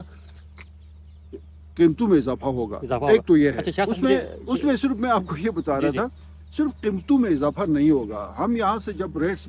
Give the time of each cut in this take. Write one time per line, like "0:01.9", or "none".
none